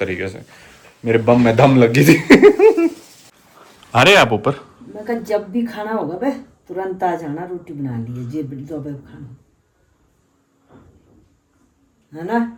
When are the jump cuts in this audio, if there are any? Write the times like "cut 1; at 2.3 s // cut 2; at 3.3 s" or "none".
none